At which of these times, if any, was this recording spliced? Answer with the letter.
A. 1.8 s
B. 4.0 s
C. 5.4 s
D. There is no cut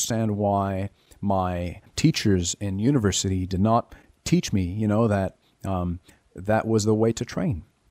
A